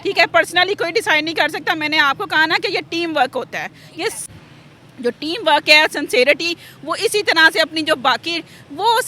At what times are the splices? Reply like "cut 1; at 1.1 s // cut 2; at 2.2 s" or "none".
cut 1; at 4.2 s

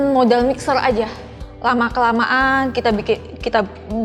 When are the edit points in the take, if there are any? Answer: cut 1; at 1.3 s

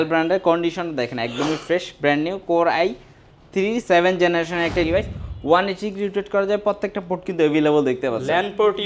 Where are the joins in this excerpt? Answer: cut 1; at 4.9 s

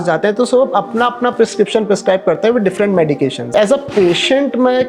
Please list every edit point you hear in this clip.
cut 1; at 3.5 s

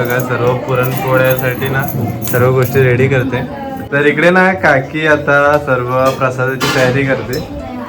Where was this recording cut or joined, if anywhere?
cut 1; at 3.8 s

